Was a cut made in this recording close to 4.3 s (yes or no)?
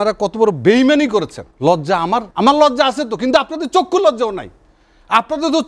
no